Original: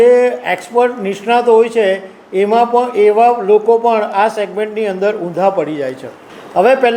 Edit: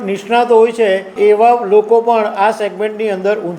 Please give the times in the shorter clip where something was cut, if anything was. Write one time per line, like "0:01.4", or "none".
0:01.1